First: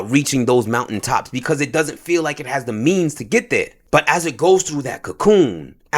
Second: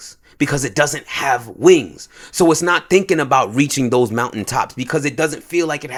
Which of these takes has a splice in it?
first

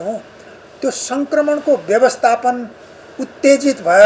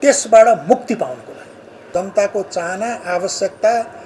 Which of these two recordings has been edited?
second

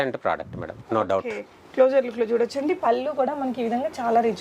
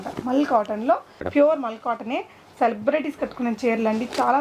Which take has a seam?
second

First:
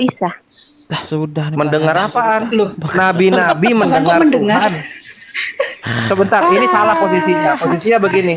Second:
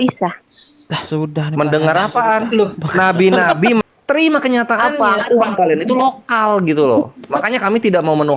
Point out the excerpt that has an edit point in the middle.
second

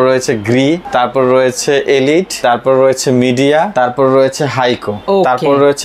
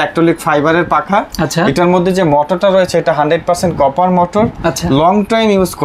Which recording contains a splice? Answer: first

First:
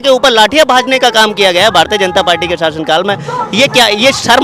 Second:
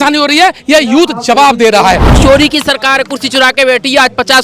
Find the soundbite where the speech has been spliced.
second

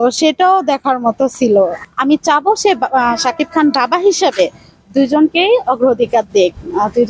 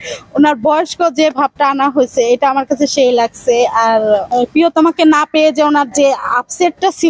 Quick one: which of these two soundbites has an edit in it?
first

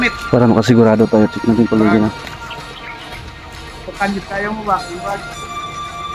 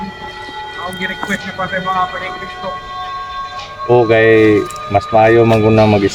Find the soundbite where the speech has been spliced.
first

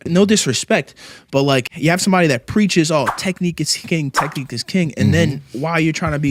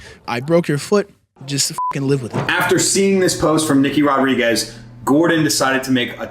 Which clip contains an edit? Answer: second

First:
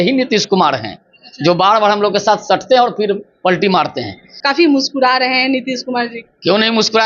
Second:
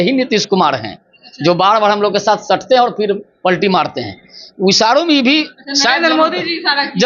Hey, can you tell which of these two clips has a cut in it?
first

